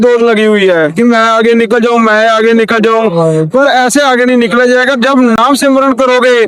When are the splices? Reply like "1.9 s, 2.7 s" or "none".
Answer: none